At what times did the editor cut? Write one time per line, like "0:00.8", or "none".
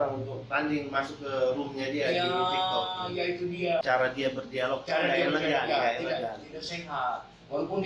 0:03.8